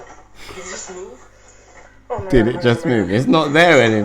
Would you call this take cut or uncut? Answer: uncut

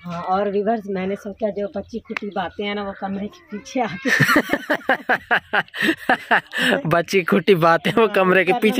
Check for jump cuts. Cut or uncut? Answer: uncut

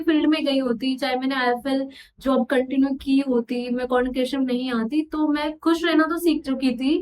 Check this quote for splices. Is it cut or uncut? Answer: uncut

